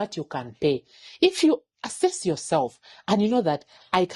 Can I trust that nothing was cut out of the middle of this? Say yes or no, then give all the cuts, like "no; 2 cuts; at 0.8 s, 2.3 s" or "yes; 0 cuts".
yes; 0 cuts